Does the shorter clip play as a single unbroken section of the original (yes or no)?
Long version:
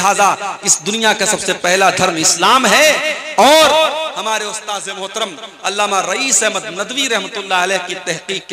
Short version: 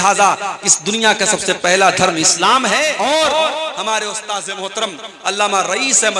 no